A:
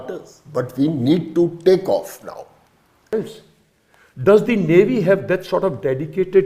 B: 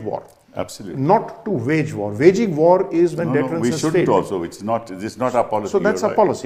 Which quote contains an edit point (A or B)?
A